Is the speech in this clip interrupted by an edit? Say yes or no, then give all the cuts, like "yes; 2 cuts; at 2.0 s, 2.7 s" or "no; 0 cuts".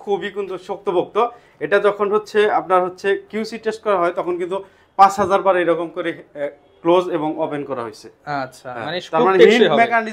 no; 0 cuts